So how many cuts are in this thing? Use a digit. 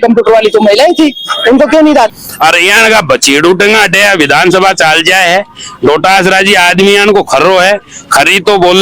1